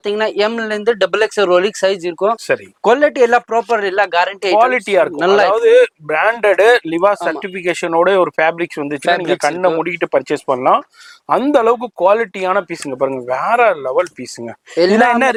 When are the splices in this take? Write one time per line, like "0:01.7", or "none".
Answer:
none